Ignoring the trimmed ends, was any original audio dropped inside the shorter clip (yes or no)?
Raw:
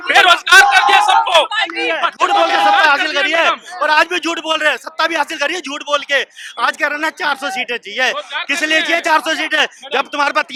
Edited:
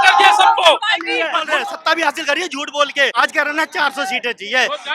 yes